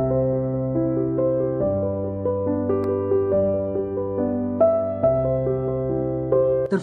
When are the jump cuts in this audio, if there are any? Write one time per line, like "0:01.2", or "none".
none

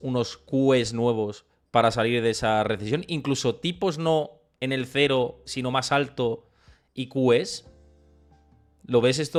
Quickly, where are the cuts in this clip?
none

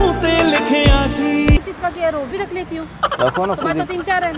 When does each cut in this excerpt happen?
0:02.3

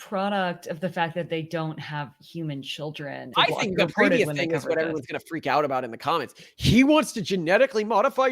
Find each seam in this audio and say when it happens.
0:03.3

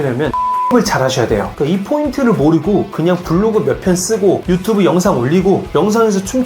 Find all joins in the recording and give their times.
0:01.5

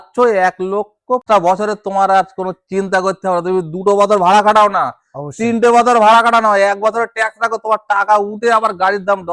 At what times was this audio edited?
0:01.2

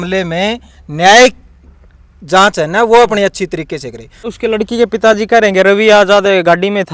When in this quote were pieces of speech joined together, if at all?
0:04.3

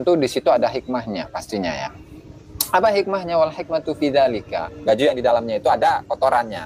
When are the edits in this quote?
0:04.7

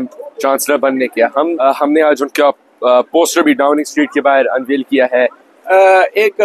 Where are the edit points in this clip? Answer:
0:01.6
0:05.5

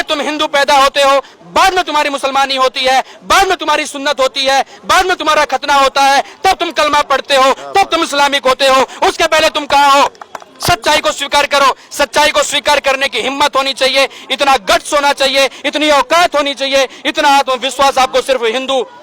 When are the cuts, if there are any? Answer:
none

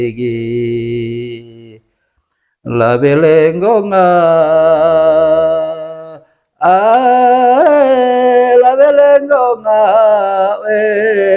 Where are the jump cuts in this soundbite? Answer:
none

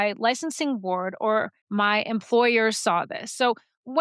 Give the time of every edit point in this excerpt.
0:01.6

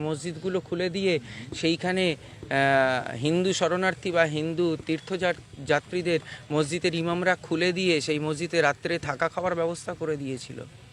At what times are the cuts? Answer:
none

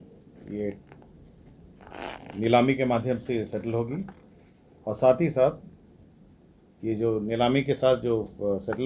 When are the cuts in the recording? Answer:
none

